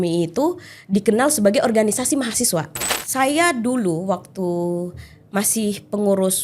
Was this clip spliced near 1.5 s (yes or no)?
no